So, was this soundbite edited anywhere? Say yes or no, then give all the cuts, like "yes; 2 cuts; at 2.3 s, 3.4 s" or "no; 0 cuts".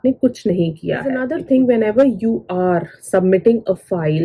yes; 1 cut; at 1.2 s